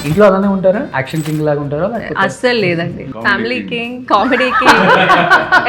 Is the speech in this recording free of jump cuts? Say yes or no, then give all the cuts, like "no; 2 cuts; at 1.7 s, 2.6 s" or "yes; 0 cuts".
no; 2 cuts; at 1.0 s, 3.1 s